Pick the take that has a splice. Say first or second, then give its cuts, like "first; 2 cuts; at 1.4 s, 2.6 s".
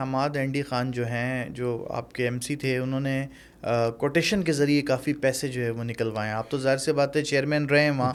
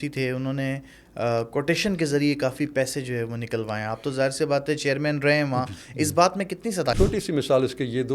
second; 1 cut; at 7.0 s